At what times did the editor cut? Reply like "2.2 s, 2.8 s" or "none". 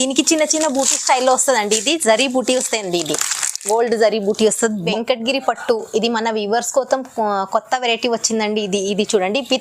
4.9 s